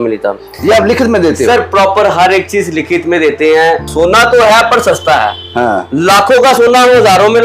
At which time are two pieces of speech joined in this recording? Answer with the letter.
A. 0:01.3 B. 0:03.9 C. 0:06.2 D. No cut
B